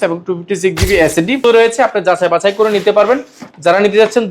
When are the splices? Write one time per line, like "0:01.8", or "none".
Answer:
0:01.4